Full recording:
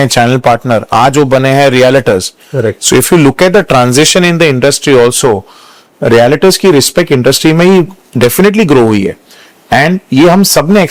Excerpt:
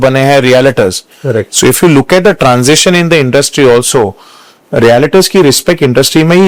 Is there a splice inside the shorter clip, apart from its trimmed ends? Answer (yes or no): no